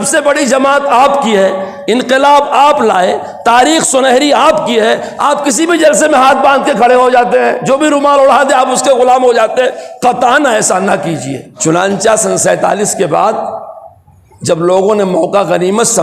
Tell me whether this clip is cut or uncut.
cut